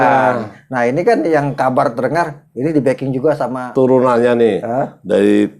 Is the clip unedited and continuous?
no; 1 cut; at 3.7 s

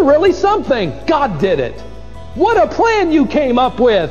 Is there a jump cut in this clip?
no; 0 cuts

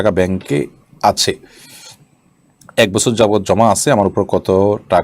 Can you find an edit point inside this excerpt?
no; 0 cuts

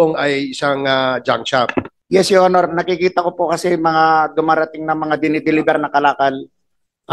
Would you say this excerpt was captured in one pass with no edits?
no; 1 cut; at 2.0 s

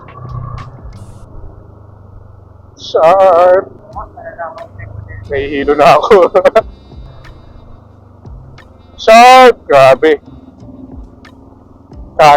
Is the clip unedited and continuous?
no; 2 cuts; at 3.8 s, 7.0 s

